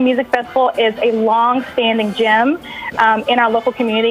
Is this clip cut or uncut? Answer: uncut